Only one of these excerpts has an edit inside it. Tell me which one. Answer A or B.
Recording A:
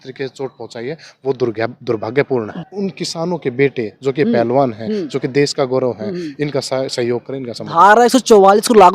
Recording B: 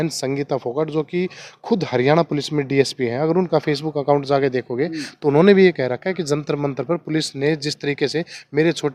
A